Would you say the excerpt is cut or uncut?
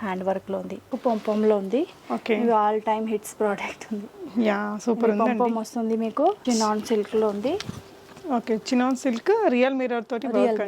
cut